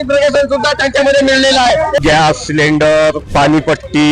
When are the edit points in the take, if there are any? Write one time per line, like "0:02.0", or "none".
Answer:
0:02.0
0:03.2